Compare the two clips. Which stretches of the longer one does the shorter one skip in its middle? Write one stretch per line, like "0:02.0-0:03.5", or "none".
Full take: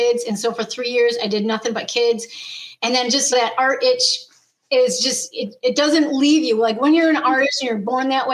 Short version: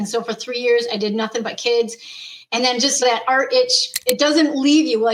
0:04.2-0:05.4